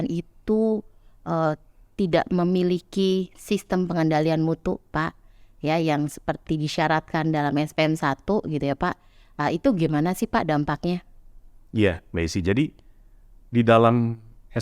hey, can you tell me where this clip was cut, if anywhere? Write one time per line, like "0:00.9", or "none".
none